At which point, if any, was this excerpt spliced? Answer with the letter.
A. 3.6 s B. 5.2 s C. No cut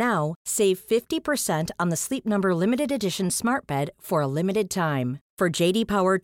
C